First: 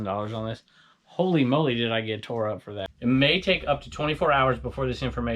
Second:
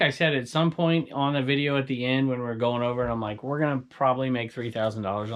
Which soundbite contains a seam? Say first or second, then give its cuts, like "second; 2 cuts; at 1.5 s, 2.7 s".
first; 1 cut; at 2.9 s